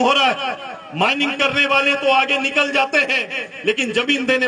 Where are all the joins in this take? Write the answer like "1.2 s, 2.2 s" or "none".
none